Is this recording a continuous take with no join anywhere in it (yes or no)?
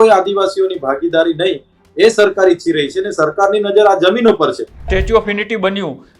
no